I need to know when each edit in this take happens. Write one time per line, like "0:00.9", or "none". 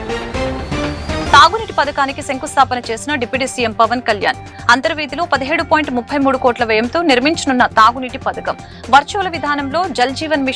0:01.3